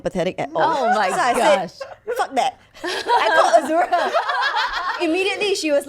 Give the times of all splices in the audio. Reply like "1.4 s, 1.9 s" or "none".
5.0 s